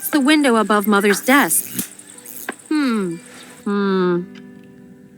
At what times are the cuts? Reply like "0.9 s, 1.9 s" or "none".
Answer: 3.2 s